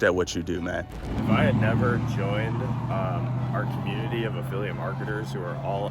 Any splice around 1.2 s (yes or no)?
yes